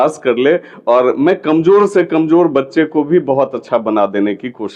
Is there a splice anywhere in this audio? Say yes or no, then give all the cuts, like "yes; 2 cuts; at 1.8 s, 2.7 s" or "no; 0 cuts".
no; 0 cuts